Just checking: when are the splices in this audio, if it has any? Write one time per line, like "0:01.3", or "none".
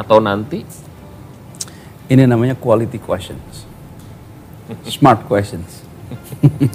none